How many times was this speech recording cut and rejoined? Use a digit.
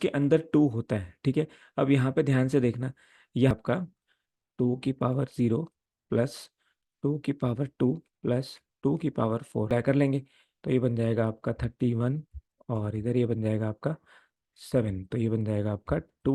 2